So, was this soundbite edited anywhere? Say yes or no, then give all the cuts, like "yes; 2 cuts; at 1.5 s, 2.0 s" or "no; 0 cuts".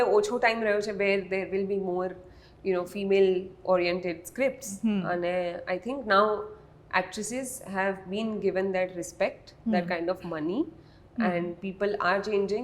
no; 0 cuts